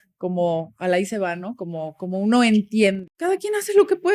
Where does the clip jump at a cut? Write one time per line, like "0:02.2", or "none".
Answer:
0:03.1